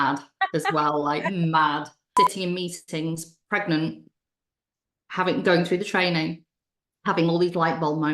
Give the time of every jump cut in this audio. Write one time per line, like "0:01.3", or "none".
0:02.1